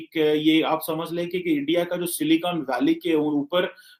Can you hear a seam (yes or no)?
no